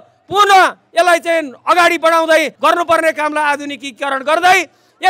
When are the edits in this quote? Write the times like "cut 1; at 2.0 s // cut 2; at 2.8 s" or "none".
cut 1; at 2.5 s